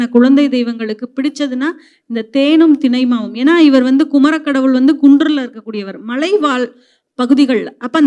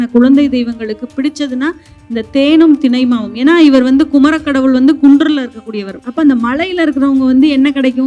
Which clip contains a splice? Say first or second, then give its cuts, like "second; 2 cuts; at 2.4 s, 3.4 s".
second; 1 cut; at 6.0 s